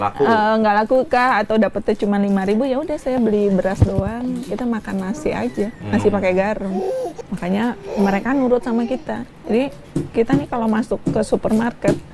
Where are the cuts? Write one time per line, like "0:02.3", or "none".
0:07.2